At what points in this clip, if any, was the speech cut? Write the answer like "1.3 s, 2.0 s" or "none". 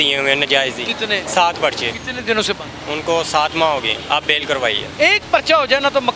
1.3 s, 2.0 s, 2.7 s, 4.0 s, 4.9 s